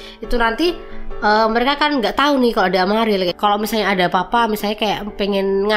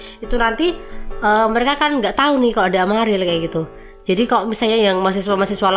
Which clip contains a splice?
first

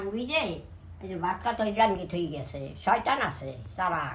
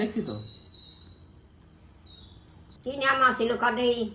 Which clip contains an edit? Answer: second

